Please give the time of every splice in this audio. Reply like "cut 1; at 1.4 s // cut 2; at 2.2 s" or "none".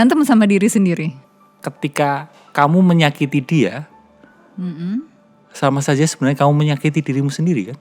cut 1; at 1.3 s